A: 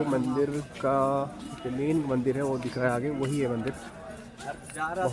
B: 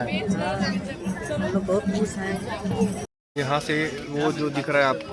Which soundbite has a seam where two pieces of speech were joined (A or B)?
B